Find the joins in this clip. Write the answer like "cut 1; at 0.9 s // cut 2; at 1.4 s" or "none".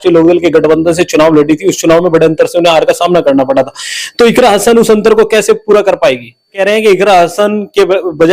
cut 1; at 6.6 s